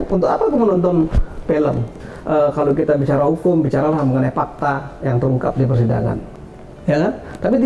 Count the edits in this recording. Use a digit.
2